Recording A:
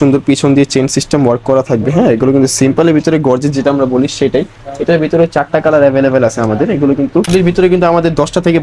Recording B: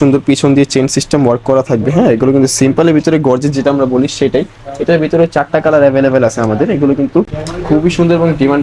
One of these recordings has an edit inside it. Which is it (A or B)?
A